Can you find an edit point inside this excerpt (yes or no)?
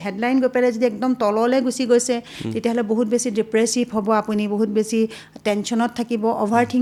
no